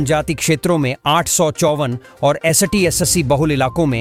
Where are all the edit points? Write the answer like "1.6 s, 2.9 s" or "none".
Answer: none